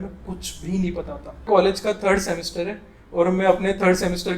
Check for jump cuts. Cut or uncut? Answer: cut